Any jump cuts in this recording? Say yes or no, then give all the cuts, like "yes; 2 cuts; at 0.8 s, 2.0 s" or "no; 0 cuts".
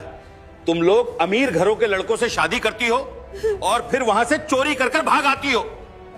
no; 0 cuts